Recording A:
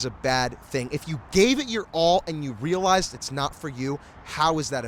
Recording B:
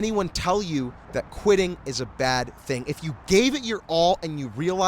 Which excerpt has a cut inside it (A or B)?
B